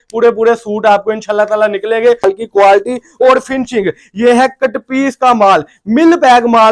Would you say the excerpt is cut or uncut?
cut